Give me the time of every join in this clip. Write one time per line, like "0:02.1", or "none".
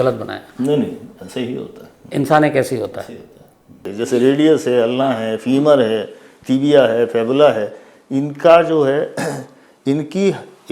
0:03.9